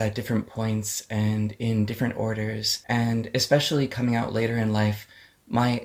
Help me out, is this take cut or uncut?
uncut